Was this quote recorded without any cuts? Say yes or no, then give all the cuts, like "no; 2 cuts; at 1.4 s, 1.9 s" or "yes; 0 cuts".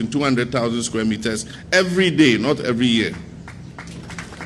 yes; 0 cuts